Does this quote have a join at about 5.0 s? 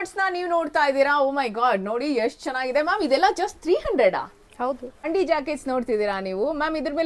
yes; 1 cut; at 5.0 s

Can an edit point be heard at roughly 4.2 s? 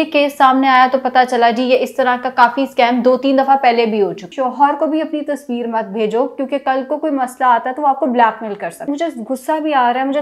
yes; 2 cuts; at 4.2 s, 8.8 s

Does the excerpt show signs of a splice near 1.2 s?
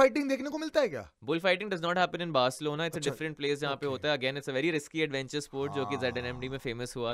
no; 0 cuts

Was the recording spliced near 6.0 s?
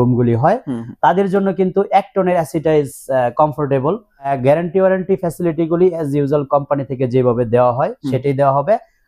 no; 1 cut; at 4.3 s

